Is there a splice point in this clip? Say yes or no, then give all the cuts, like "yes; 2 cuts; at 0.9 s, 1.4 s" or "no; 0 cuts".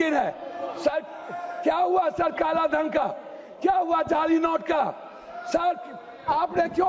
no; 0 cuts